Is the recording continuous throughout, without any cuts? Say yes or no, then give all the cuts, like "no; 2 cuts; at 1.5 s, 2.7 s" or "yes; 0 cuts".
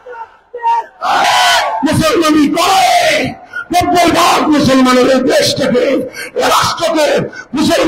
no; 1 cut; at 1.3 s